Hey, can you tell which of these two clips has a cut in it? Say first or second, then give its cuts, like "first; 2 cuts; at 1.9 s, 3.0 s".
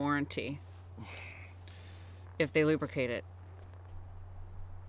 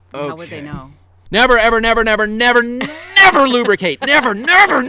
second; 1 cut; at 1.1 s